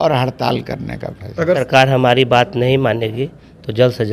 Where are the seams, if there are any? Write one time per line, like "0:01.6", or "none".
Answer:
0:01.6